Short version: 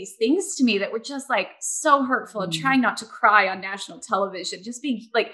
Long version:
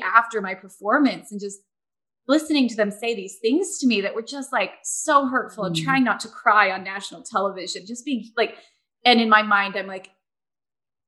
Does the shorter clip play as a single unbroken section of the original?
yes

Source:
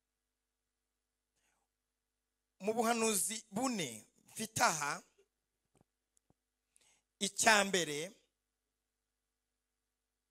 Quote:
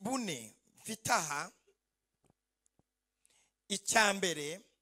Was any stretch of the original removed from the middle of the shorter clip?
no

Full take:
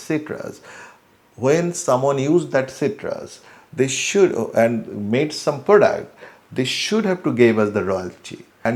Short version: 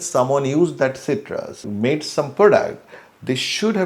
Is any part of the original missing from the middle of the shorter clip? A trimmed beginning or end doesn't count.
yes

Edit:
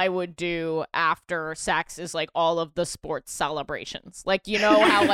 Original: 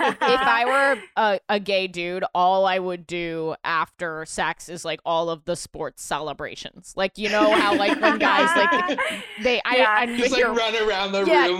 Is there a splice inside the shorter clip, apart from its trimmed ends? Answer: no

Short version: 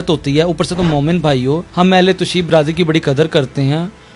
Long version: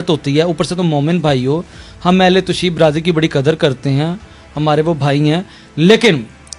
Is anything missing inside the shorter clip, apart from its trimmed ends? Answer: yes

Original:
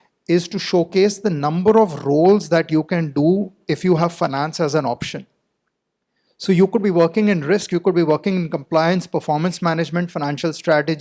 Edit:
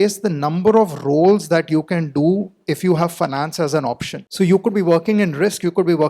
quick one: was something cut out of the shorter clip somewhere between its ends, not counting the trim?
yes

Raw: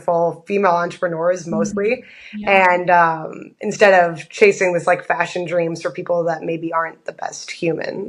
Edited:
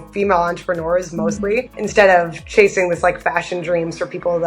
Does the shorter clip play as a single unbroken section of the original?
no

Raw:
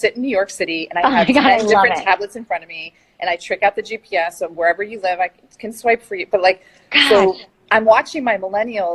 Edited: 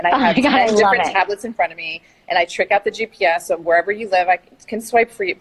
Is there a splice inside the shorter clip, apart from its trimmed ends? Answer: no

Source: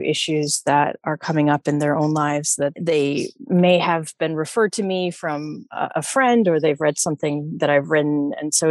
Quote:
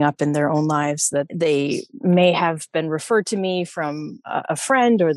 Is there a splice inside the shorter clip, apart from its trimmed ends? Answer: no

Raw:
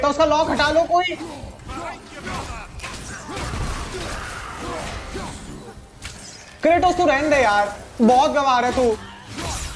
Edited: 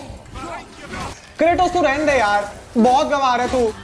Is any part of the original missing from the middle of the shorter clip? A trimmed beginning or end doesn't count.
yes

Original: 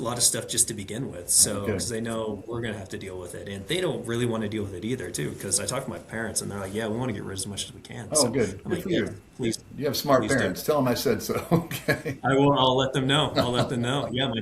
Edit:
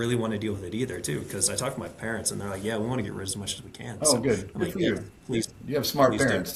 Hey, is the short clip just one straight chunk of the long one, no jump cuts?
yes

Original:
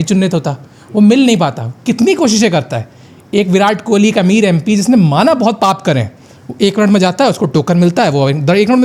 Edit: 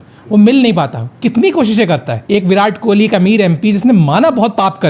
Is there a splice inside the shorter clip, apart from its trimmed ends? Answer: yes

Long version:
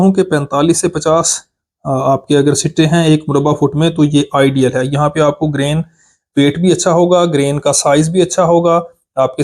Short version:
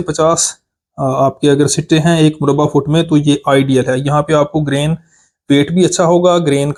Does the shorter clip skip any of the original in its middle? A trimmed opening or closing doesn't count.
no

